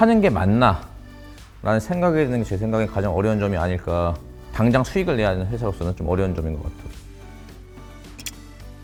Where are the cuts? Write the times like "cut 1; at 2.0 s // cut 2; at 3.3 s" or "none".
none